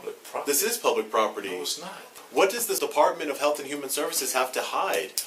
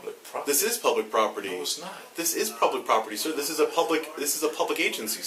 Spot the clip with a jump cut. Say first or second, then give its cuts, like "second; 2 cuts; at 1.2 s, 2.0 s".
first; 2 cuts; at 2.2 s, 2.8 s